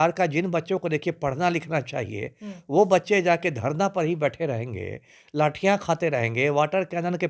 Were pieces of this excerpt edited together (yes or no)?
no